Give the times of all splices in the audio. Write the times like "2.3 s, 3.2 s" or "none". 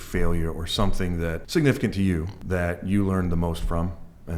1.4 s, 2.3 s